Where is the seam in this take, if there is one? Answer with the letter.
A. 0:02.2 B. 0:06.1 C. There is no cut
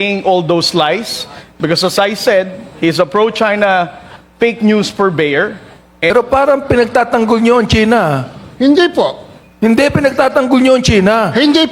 B